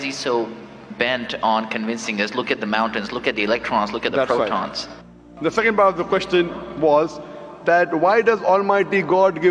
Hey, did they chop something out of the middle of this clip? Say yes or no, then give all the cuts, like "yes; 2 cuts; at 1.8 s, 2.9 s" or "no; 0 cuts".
no; 0 cuts